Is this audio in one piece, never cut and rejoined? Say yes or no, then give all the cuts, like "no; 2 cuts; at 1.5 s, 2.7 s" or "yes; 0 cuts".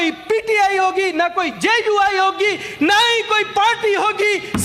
yes; 0 cuts